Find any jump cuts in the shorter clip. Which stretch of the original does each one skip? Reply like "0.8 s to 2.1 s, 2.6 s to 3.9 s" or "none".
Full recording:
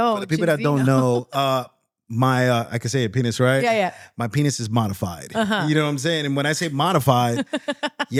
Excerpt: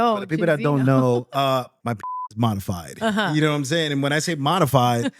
2.2 s to 4.5 s